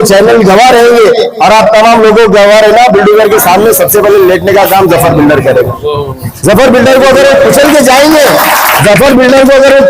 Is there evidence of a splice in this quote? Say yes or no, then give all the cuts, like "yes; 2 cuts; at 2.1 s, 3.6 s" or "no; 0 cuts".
yes; 1 cut; at 8.7 s